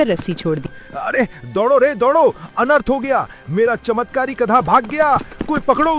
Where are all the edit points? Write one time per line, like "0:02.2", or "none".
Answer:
none